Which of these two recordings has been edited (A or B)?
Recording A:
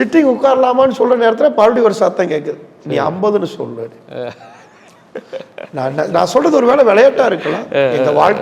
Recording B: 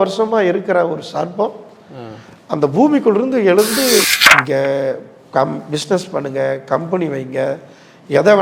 B